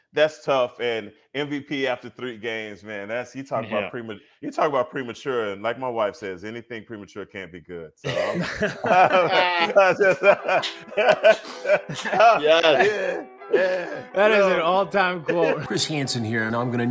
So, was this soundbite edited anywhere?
yes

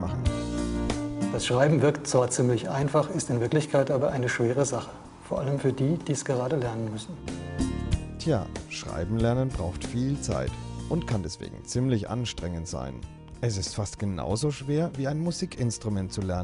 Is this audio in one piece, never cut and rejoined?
no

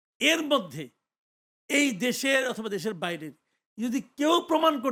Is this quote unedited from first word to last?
yes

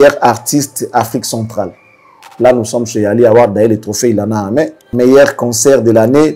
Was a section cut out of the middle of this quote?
yes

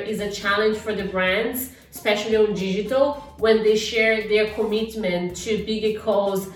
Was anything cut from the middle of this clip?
no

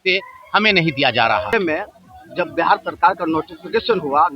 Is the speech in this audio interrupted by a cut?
yes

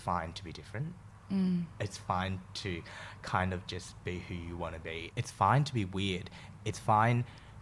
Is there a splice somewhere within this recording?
no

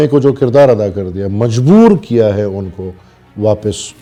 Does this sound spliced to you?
no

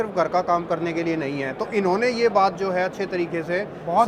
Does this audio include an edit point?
no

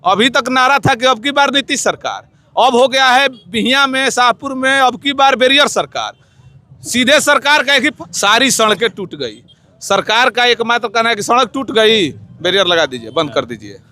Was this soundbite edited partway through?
yes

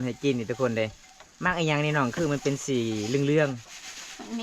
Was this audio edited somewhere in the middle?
no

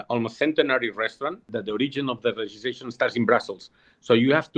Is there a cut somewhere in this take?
yes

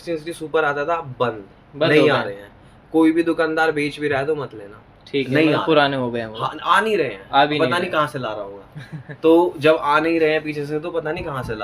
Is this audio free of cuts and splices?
yes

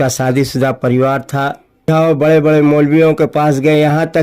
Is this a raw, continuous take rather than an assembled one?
no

